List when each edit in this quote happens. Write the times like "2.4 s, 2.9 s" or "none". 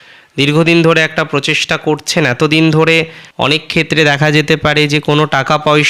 3.2 s